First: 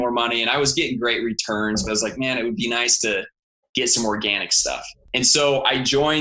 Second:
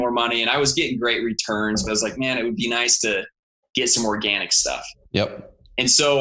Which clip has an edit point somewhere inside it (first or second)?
first